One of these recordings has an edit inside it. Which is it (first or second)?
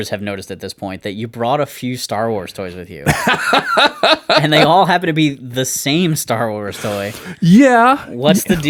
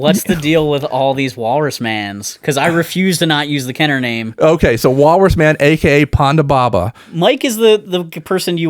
second